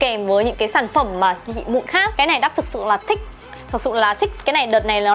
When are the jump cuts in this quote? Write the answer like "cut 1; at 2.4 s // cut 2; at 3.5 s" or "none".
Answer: cut 1; at 2.1 s